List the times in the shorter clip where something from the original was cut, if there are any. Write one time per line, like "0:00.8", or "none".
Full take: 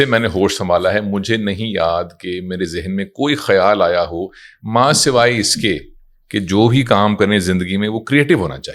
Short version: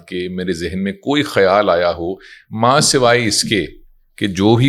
none